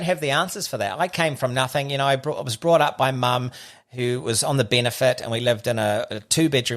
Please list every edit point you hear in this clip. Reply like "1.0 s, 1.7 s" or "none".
none

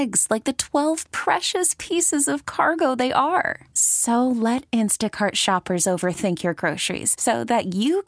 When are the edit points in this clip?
none

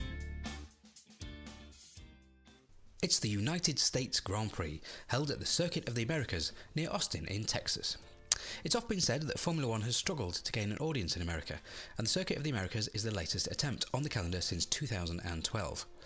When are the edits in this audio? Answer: 3.0 s

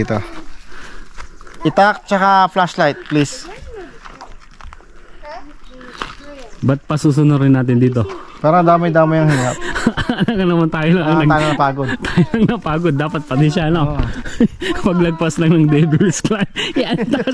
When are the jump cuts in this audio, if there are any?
none

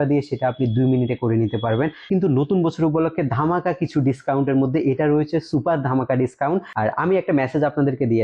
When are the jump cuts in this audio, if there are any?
2.1 s, 6.7 s

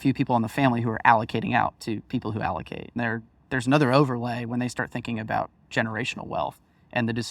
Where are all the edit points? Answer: 3.0 s

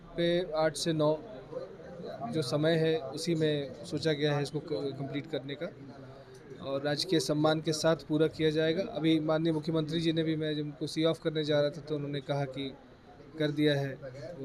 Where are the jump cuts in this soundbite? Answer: none

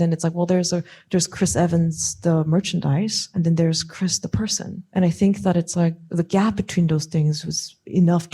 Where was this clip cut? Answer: 3.3 s, 4.8 s

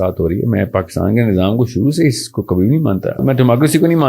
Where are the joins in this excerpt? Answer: 3.2 s

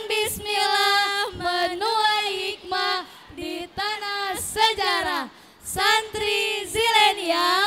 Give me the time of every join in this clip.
none

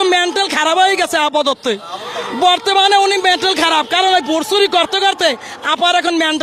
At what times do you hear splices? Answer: none

